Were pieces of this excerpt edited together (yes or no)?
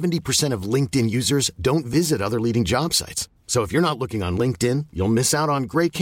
no